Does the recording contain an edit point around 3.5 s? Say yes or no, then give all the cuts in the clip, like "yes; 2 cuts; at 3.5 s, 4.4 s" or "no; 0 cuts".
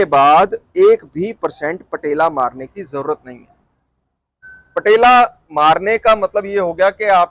no; 0 cuts